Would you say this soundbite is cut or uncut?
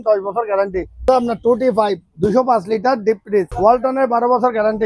cut